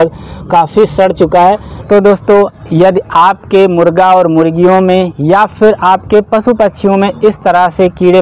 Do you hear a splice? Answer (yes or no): yes